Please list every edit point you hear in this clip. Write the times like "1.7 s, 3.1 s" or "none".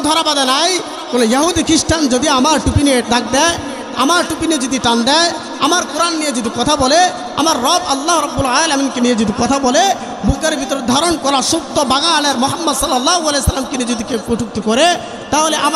none